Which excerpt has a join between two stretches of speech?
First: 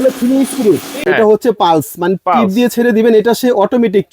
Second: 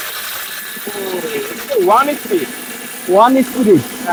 first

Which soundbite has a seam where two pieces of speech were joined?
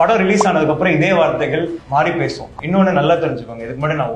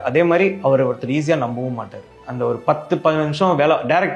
first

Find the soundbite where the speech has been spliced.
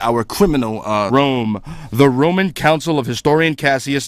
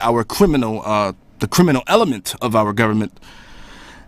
second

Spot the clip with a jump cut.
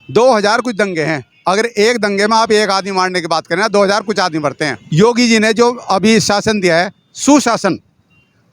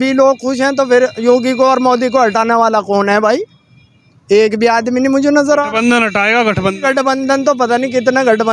first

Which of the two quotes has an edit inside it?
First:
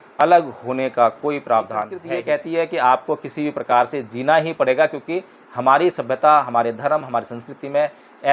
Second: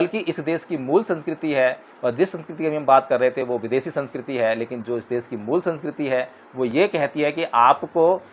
first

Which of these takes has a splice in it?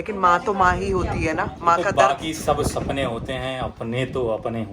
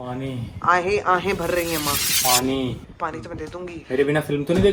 first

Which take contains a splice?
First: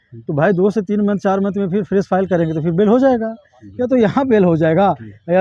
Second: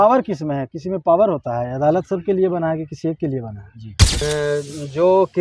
second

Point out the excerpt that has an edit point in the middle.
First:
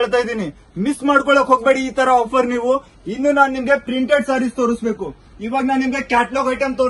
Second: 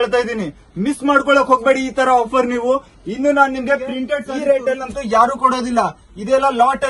second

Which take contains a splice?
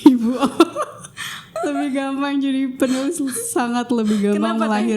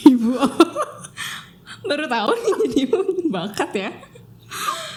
first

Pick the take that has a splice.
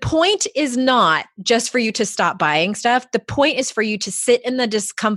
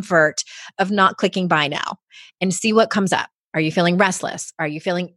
second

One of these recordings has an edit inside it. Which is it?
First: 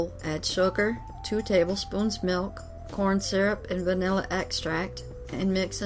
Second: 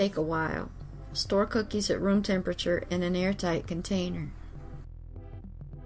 second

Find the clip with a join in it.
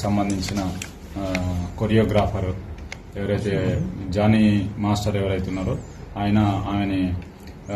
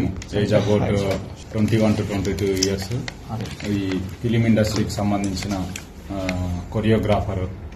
second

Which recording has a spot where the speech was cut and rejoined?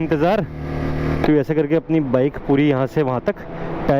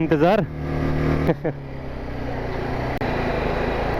first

